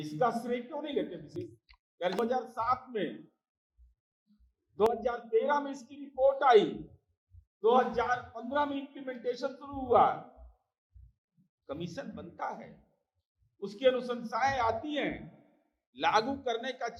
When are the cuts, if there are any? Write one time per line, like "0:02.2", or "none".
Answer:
none